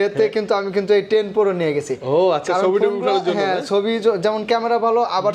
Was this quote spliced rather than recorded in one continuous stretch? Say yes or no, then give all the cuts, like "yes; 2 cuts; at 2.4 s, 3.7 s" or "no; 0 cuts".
no; 0 cuts